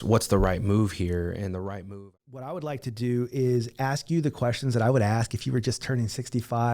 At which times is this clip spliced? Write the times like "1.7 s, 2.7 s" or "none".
2.1 s